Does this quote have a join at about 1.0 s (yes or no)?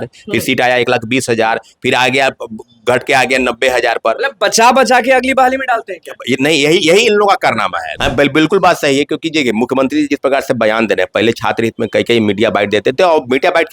no